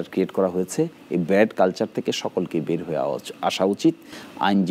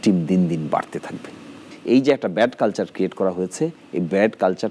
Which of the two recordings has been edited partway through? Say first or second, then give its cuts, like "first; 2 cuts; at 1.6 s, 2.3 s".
second; 1 cut; at 1.7 s